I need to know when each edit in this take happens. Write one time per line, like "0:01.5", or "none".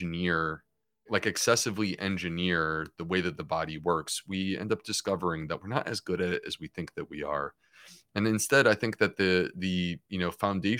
0:01.1